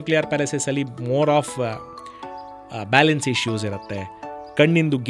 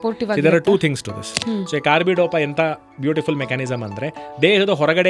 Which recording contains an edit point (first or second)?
second